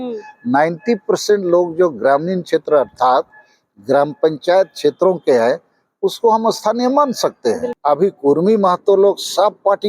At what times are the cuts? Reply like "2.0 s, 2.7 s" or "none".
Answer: 7.7 s